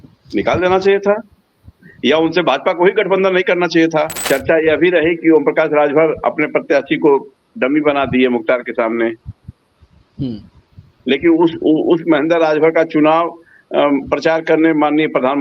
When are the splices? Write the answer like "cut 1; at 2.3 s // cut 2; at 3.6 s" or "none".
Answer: cut 1; at 4.2 s